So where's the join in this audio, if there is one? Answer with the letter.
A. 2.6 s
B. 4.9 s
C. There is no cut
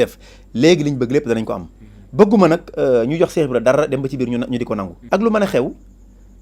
B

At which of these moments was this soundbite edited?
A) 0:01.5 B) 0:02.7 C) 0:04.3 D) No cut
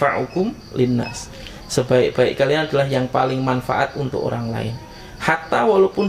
D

